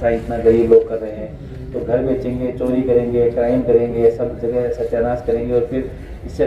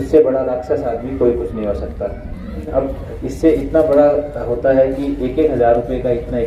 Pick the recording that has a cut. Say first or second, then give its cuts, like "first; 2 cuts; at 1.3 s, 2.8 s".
second; 1 cut; at 2.7 s